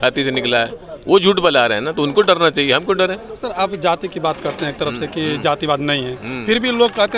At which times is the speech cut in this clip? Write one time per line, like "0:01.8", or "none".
none